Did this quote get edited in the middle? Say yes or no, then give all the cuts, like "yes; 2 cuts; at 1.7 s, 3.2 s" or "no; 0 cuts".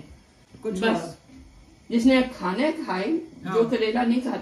no; 0 cuts